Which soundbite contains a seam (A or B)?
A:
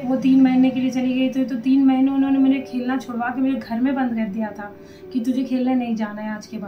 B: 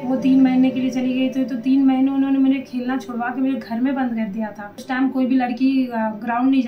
B